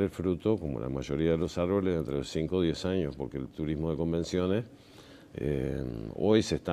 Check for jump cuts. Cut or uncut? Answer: uncut